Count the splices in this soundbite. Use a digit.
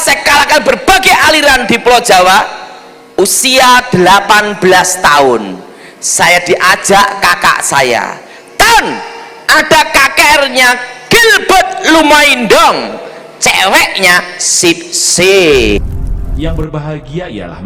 1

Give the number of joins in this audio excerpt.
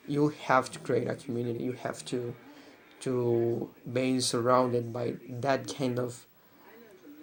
0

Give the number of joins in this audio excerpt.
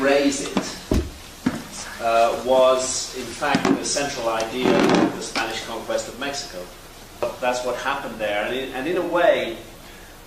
1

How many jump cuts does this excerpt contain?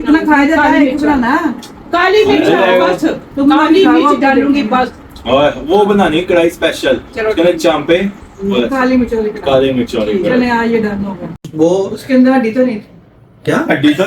1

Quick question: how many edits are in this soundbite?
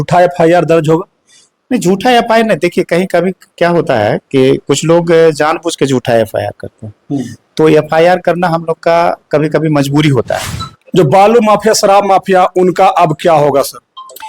1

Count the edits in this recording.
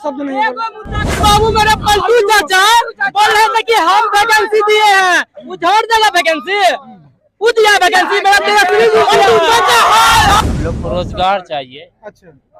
2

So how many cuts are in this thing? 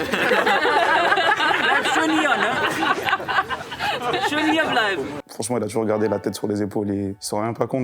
1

